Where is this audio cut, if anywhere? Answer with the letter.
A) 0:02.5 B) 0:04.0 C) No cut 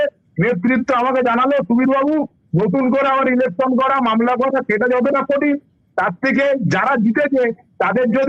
C